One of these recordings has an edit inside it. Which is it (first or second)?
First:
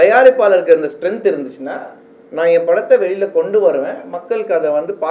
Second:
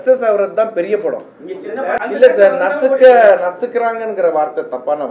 second